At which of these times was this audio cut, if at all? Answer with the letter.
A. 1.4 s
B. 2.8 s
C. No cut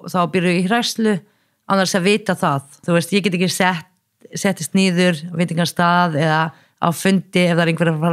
B